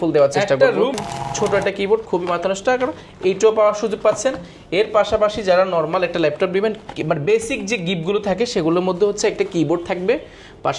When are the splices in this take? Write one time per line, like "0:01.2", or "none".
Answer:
0:01.0